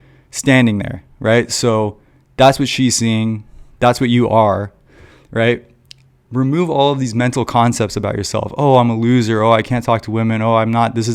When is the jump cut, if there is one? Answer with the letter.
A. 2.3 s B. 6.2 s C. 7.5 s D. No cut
D